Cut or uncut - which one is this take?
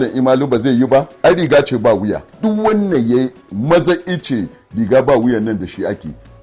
cut